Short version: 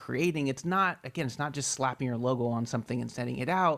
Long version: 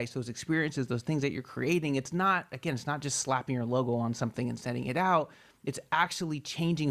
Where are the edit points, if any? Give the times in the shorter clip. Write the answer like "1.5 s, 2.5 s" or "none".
none